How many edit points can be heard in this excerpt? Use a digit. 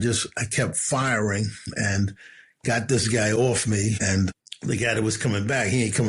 1